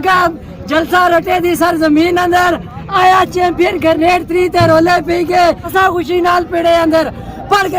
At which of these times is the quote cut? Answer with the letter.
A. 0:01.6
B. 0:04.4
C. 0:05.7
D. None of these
C